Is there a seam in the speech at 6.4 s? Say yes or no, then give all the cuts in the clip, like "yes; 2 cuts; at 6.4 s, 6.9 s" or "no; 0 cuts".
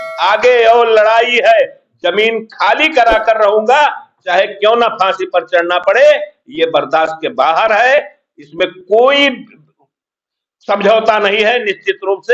no; 0 cuts